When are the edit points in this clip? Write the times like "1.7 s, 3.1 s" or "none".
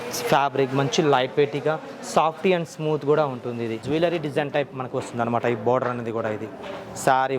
3.8 s